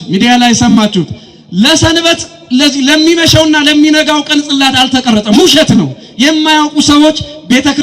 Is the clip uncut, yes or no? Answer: yes